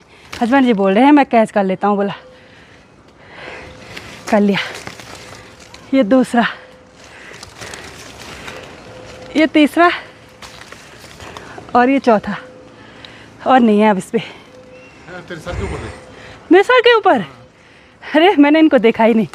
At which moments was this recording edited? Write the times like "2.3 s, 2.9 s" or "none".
none